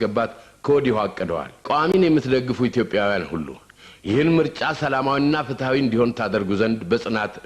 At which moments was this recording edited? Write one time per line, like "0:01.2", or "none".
0:01.7